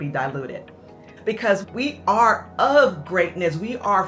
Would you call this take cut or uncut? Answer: cut